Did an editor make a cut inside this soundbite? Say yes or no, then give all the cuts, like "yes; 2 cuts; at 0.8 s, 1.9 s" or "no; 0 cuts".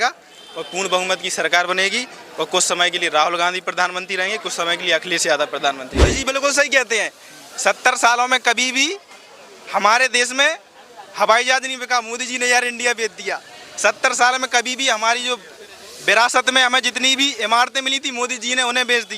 yes; 1 cut; at 6.2 s